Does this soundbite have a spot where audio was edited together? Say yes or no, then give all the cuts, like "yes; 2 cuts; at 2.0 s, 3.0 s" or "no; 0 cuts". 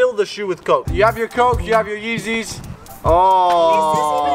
no; 0 cuts